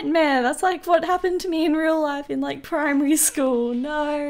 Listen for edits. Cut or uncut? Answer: uncut